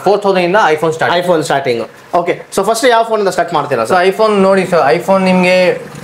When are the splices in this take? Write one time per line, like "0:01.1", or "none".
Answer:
none